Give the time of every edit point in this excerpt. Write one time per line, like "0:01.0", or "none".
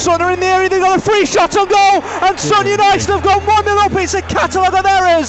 none